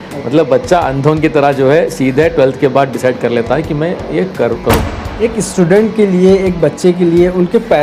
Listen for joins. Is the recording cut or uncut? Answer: cut